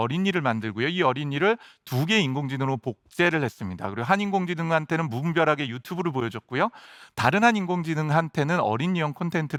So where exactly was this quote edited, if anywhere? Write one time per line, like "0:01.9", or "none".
none